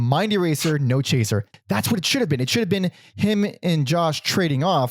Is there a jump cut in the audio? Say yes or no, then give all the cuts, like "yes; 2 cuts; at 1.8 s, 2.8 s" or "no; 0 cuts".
yes; 1 cut; at 1.5 s